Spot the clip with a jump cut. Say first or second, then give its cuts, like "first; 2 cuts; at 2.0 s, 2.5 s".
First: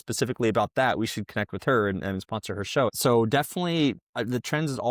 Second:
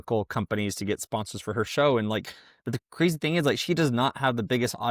first; 1 cut; at 3.0 s